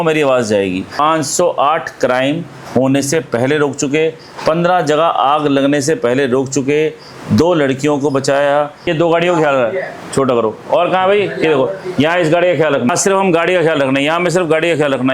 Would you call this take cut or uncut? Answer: cut